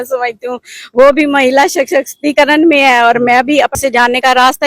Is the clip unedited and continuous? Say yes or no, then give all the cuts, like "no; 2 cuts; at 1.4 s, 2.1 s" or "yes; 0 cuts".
no; 1 cut; at 3.8 s